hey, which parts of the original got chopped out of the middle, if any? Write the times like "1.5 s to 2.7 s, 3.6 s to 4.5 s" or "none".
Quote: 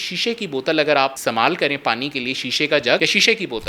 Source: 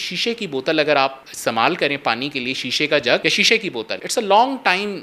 1.2 s to 1.4 s